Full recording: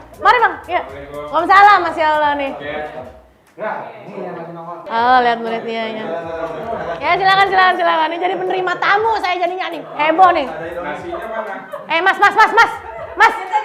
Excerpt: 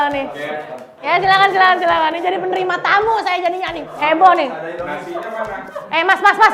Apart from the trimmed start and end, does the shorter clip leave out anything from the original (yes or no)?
yes